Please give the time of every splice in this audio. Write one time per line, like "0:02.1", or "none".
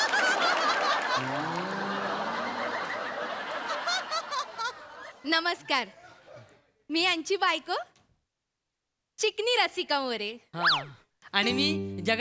none